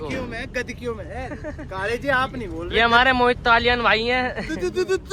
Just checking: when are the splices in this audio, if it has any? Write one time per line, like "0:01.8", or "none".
none